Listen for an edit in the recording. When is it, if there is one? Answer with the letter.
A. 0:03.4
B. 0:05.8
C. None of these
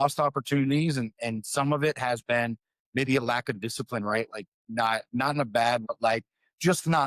B